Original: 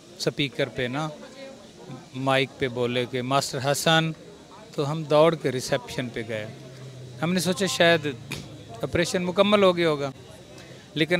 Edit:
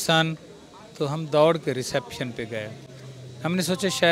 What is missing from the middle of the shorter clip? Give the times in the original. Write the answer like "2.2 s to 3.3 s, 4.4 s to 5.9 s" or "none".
none